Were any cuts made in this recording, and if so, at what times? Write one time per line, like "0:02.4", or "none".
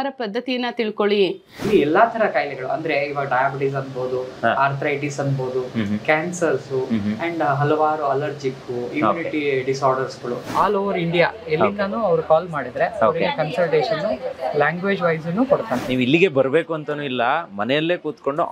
0:01.7
0:10.5
0:15.8

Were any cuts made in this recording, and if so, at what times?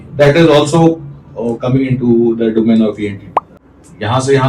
0:03.4

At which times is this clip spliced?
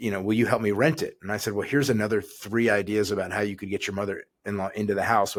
none

